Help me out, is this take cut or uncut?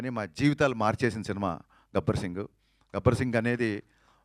uncut